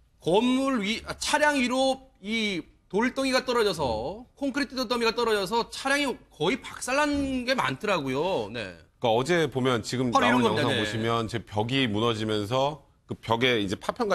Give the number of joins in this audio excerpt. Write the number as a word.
zero